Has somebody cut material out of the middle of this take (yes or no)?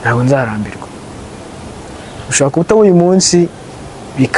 no